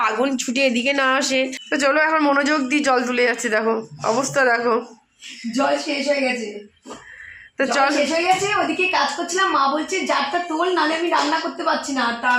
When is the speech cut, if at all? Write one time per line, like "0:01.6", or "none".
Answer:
0:01.6